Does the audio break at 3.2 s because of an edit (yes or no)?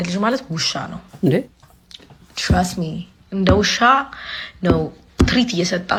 no